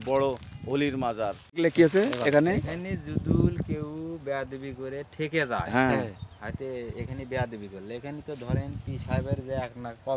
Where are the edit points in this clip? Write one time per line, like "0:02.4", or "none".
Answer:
0:01.4